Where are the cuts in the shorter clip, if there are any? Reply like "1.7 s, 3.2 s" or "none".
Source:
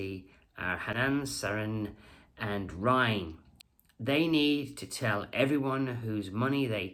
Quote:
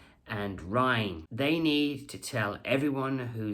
1.2 s